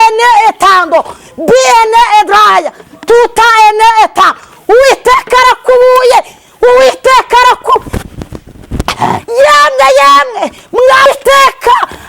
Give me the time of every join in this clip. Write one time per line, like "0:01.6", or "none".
0:11.1